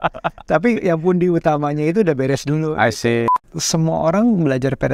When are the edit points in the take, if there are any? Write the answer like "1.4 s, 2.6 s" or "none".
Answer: 3.3 s